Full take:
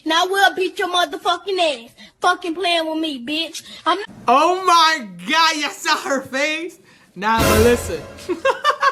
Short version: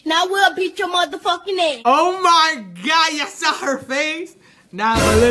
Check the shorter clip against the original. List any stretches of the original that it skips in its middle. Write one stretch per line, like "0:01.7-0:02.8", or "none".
0:01.8-0:04.2